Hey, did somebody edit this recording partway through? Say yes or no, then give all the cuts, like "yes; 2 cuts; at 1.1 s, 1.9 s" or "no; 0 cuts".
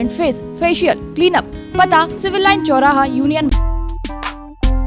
yes; 1 cut; at 3.5 s